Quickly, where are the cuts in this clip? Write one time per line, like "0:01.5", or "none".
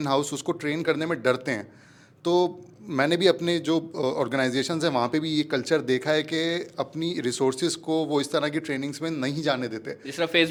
none

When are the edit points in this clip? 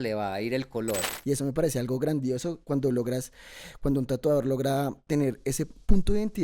0:01.1

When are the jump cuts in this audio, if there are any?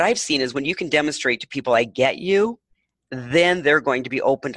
none

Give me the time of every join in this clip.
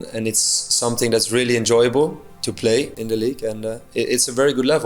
0:02.9

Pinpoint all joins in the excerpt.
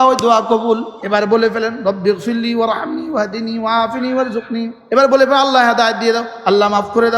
0:00.9
0:04.8

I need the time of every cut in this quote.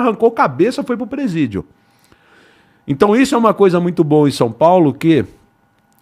none

